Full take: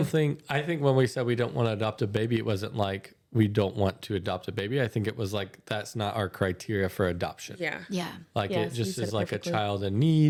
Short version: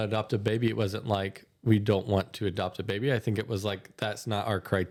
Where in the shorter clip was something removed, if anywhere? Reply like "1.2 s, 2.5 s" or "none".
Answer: none